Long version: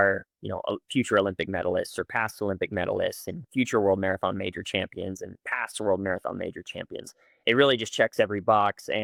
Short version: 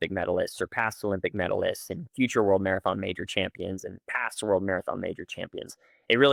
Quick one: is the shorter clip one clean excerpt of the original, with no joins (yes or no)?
yes